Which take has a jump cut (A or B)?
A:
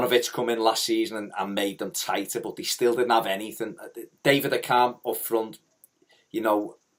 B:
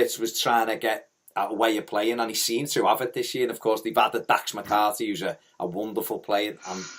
B